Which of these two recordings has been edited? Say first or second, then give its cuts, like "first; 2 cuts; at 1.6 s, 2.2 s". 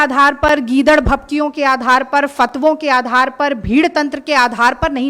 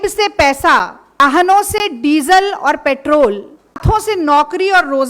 second; 2 cuts; at 1.2 s, 3.8 s